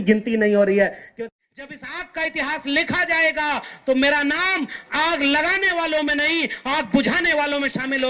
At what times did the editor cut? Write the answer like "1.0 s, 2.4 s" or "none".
1.1 s